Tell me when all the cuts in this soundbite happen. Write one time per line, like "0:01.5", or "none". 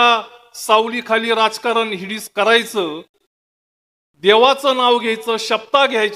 none